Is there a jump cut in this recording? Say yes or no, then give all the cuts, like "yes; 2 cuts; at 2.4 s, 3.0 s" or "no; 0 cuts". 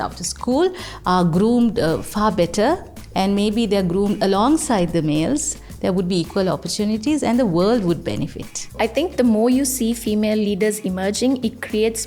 yes; 1 cut; at 8.7 s